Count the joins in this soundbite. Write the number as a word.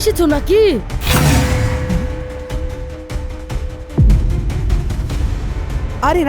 zero